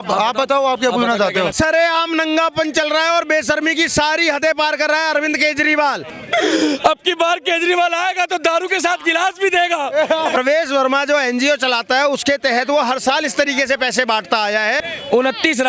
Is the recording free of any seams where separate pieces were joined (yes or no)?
no